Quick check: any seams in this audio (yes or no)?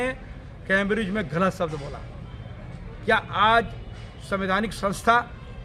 no